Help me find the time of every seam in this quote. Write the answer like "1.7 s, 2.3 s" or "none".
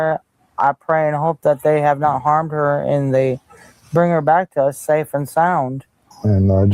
none